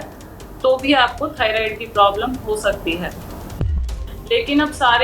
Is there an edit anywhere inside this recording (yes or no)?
yes